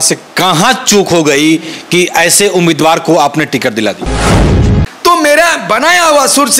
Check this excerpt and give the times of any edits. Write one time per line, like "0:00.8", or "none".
0:04.4